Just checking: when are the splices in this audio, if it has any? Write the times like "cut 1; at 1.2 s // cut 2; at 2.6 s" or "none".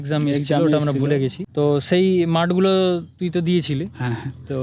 none